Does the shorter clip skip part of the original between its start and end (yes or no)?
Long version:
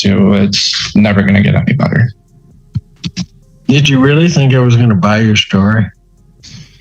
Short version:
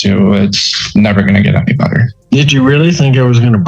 yes